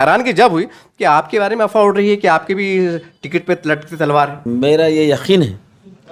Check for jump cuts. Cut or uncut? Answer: cut